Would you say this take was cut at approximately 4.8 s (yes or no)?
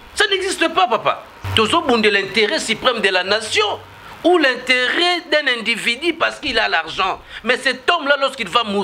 no